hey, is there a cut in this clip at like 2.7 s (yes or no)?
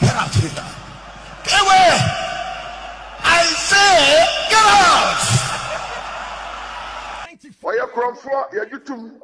no